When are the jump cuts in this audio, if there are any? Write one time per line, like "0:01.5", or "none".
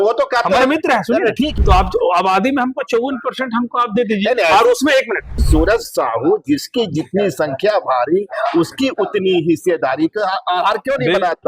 0:01.5
0:05.4